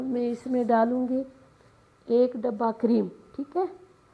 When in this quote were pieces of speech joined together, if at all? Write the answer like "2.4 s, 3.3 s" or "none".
none